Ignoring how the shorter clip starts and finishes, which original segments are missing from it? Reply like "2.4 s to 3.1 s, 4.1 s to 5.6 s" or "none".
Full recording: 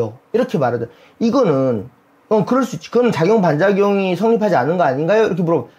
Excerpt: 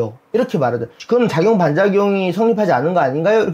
1.0 s to 2.8 s